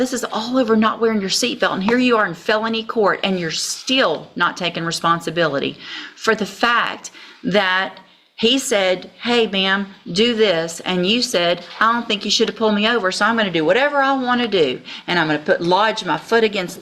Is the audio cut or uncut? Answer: uncut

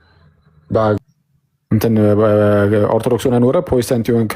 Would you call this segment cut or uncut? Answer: cut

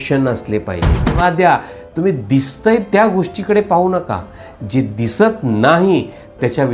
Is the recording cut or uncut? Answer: cut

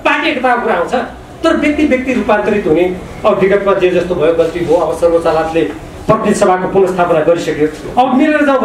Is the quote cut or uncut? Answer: uncut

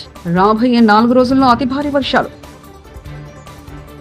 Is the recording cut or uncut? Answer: uncut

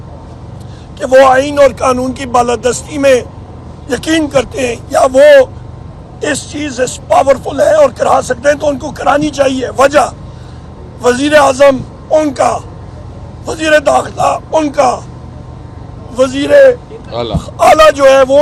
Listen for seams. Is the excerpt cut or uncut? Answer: uncut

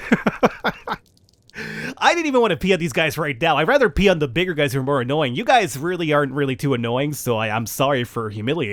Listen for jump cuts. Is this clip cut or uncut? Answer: uncut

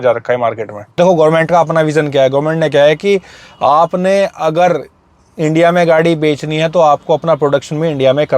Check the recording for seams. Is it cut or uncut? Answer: cut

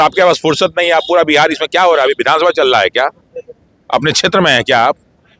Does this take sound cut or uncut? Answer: uncut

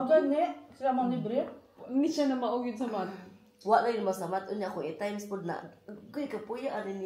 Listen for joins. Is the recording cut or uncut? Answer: uncut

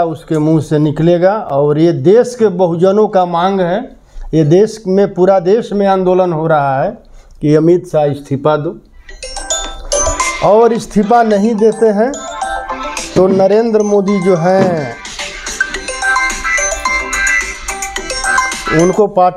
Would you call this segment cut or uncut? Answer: uncut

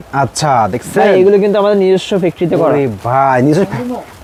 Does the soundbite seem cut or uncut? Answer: uncut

